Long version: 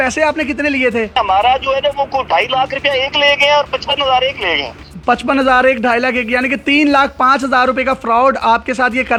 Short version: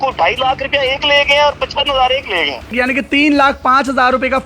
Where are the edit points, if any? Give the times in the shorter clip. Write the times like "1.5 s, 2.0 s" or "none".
2.7 s